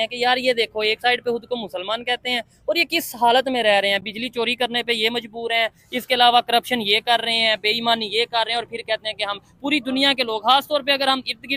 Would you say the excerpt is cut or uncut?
uncut